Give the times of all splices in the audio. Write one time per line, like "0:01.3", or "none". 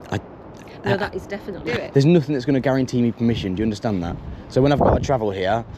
0:01.6